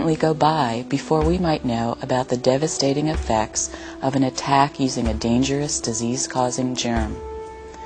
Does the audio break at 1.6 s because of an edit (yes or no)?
no